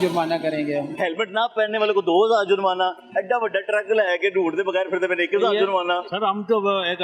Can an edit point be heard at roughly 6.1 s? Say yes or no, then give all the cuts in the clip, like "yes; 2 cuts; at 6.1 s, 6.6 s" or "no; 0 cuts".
yes; 2 cuts; at 0.9 s, 6.1 s